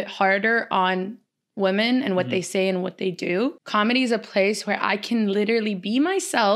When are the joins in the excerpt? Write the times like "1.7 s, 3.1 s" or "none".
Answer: 3.6 s